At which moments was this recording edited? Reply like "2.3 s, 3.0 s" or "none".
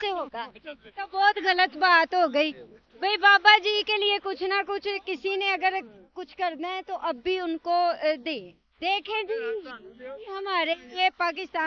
none